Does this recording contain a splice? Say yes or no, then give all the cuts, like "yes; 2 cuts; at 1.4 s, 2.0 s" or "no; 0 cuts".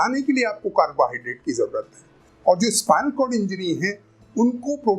yes; 1 cut; at 2.2 s